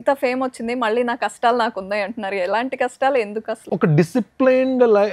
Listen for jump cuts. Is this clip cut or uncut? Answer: cut